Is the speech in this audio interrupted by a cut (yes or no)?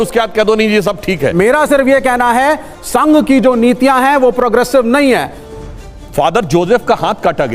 yes